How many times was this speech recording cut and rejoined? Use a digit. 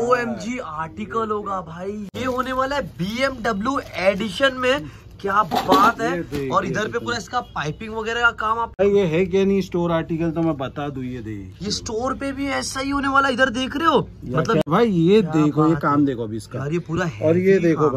3